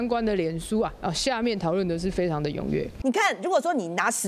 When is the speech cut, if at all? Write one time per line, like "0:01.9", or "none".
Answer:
0:02.9